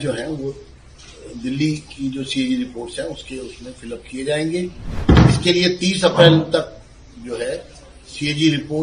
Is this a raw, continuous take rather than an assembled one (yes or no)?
no